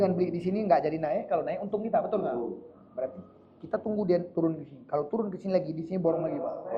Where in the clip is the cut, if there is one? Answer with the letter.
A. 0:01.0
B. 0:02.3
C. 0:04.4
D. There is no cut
D